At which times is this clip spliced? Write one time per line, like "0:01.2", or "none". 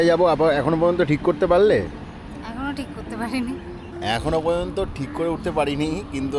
none